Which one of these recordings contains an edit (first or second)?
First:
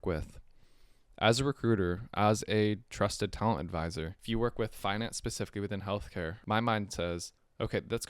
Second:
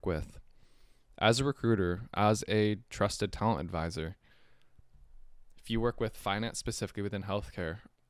first